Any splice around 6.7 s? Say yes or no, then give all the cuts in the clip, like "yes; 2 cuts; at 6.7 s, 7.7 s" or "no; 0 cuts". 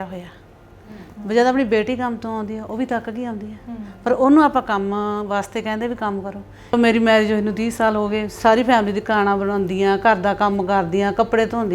yes; 1 cut; at 6.7 s